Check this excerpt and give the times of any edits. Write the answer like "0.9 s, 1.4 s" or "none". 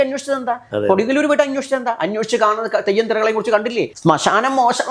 3.9 s

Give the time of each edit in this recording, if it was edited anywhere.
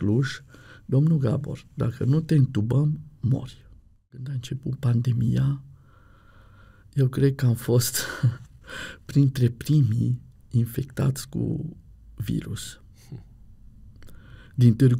4.4 s

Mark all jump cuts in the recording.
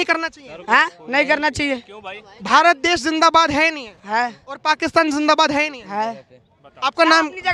none

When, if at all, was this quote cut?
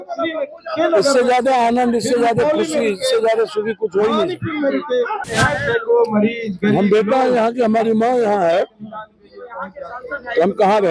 5.3 s

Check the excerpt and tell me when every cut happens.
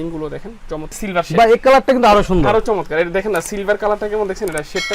0.9 s

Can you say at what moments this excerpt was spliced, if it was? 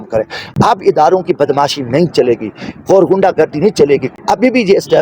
4.1 s

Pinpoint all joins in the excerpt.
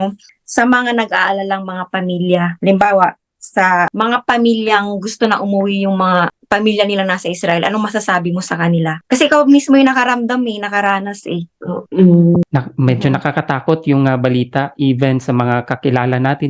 12.5 s

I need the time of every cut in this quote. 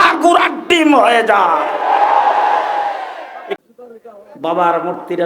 3.6 s

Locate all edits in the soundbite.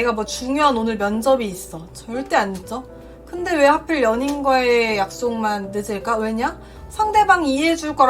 none

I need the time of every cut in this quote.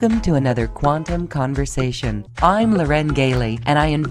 2.3 s

